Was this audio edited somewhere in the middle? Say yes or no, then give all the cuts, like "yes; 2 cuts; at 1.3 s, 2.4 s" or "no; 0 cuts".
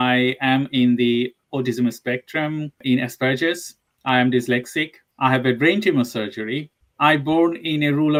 no; 0 cuts